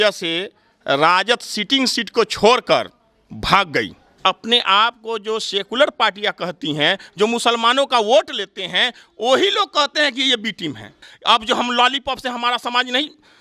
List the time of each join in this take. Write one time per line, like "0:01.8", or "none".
0:04.2
0:11.1